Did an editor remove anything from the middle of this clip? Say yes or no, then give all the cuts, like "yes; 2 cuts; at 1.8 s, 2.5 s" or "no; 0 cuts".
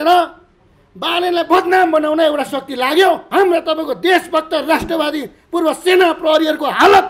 yes; 1 cut; at 3.2 s